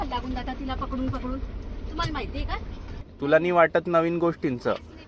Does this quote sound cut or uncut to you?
cut